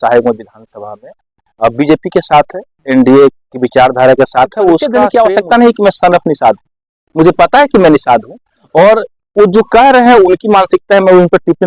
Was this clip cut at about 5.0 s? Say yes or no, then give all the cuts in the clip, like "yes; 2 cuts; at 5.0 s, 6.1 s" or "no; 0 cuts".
yes; 1 cut; at 5.0 s